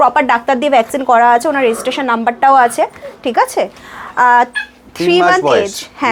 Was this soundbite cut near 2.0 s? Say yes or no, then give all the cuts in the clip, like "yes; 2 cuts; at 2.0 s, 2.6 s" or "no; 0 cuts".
no; 0 cuts